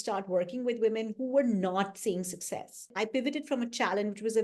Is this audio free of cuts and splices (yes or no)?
no